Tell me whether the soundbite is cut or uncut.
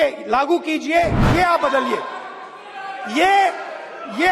cut